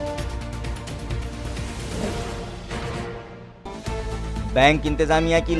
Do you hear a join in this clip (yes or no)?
yes